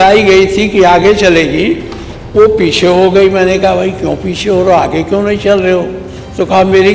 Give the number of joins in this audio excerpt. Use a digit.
0